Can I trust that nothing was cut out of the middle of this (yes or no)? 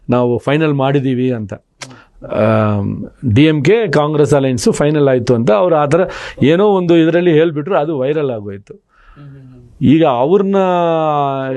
yes